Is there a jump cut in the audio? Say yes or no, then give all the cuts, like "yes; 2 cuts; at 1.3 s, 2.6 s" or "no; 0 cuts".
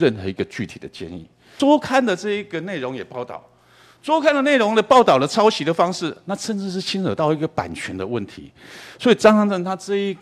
yes; 1 cut; at 1.5 s